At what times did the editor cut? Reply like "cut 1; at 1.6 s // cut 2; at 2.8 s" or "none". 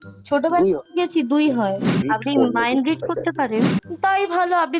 cut 1; at 2.0 s // cut 2; at 3.8 s

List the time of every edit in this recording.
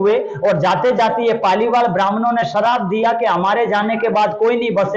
none

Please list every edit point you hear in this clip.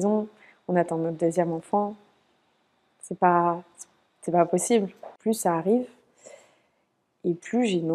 cut 1; at 5.0 s

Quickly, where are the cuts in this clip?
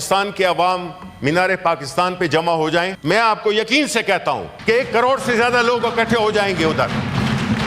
cut 1; at 2.9 s // cut 2; at 4.5 s

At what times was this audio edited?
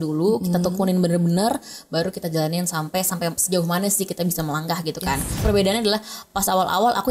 cut 1; at 5.4 s

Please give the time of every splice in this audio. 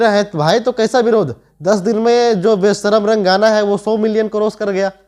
none

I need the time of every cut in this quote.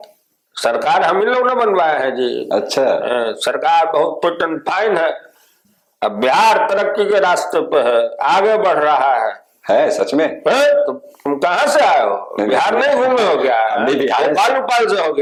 none

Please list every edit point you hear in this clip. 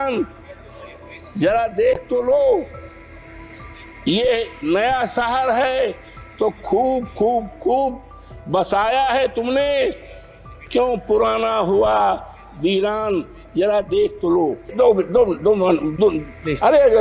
cut 1; at 14.7 s

